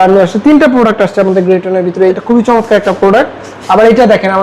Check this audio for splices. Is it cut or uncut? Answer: cut